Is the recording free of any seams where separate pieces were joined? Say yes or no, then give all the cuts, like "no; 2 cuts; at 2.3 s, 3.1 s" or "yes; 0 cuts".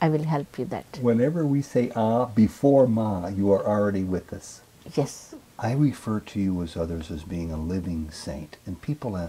no; 1 cut; at 5.3 s